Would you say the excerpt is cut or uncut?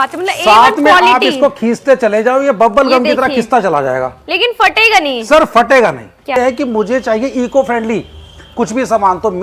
cut